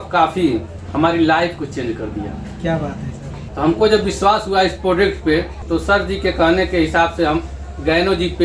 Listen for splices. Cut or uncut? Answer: uncut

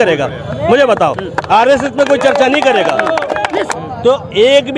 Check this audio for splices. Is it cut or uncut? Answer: cut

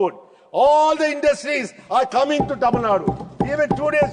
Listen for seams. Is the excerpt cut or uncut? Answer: uncut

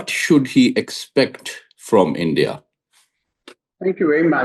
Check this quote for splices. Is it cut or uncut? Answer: uncut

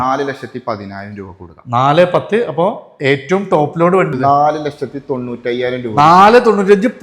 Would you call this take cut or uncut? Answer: cut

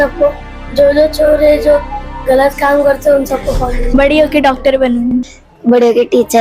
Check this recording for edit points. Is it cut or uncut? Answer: cut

